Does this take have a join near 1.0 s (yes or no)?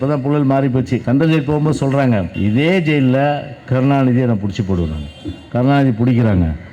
yes